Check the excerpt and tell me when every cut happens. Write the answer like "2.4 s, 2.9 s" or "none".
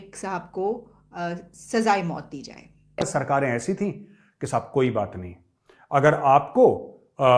3.1 s